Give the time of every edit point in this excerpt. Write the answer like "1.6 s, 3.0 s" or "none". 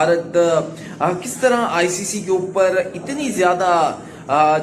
none